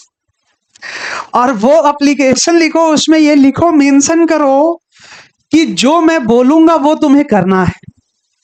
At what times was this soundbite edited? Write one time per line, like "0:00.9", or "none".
none